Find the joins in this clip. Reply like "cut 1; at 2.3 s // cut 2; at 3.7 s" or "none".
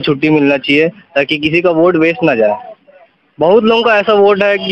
none